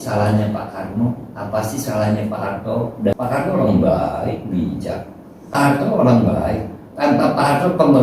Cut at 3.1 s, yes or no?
yes